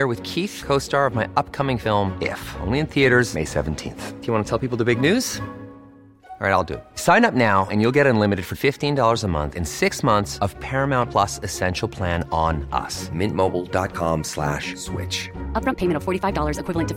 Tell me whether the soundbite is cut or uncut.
uncut